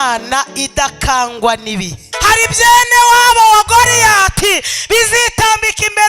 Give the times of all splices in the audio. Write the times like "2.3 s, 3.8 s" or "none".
2.0 s